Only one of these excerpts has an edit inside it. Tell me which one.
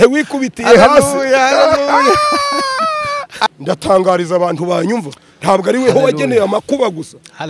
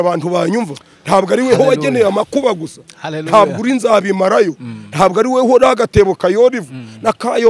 first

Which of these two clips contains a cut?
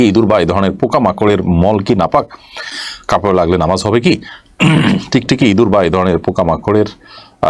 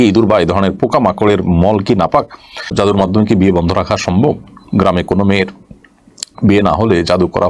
second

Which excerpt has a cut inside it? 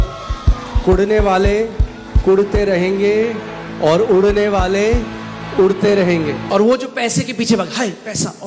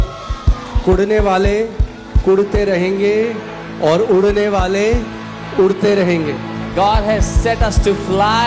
first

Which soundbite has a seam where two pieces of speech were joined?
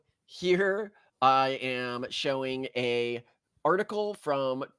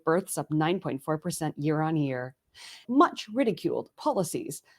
second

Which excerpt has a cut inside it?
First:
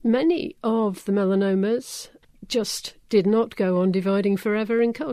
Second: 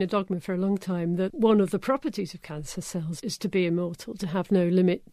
second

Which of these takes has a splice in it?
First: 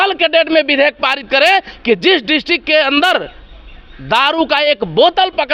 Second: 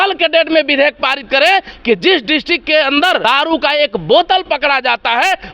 second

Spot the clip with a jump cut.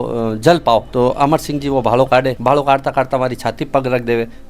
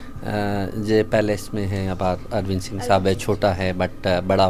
first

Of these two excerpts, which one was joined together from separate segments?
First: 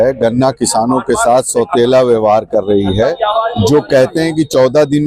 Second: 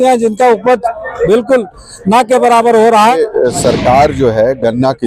second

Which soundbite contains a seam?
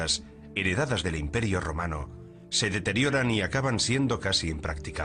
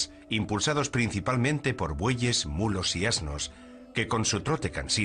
first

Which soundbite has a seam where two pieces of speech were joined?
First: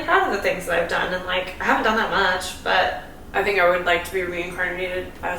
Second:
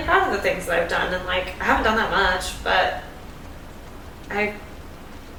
first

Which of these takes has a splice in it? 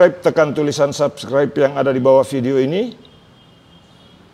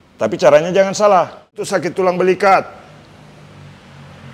second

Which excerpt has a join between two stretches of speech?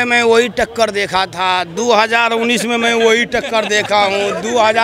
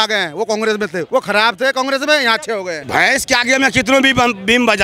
second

